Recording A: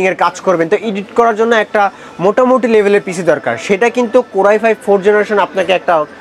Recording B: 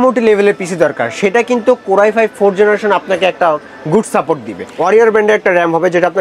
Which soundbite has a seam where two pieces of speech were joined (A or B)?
B